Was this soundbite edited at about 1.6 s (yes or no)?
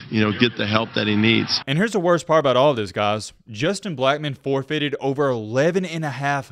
yes